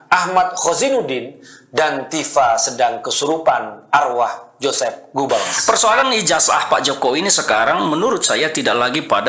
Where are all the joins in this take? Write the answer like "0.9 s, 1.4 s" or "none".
5.5 s